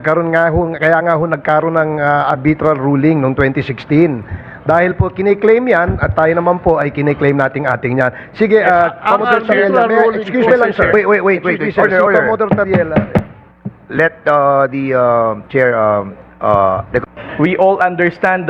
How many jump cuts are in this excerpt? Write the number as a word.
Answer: zero